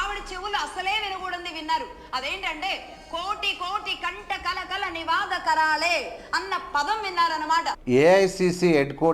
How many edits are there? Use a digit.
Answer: 1